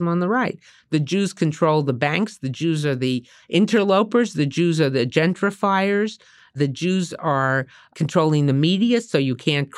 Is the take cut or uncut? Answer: cut